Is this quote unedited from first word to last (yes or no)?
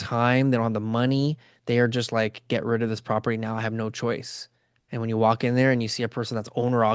yes